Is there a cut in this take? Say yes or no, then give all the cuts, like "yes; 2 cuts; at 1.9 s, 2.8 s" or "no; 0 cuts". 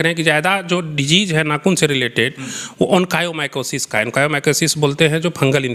no; 0 cuts